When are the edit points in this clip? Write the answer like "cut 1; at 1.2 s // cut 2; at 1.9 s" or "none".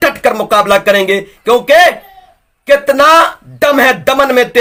none